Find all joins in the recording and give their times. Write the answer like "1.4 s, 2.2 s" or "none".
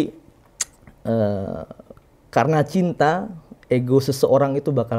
none